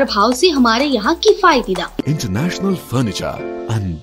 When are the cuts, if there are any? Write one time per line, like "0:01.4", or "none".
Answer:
0:02.0

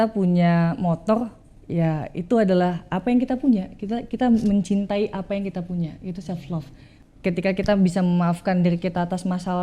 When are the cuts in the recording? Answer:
0:06.9

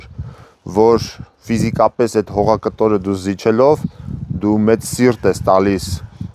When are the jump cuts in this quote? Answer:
none

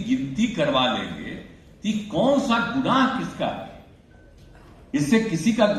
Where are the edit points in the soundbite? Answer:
none

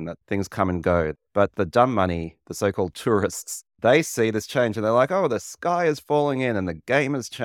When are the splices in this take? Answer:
0:01.1

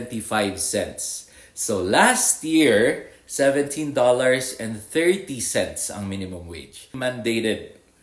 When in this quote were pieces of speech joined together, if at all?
0:07.0

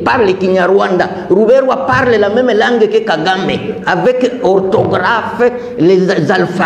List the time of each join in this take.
none

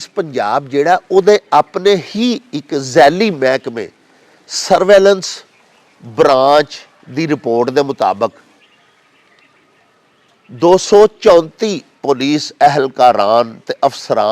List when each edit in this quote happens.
none

